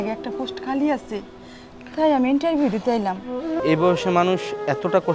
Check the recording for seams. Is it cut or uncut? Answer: cut